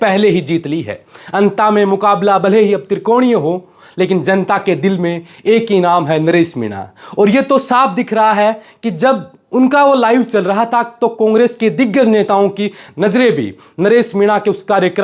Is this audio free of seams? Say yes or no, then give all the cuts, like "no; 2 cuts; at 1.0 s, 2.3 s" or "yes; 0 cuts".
yes; 0 cuts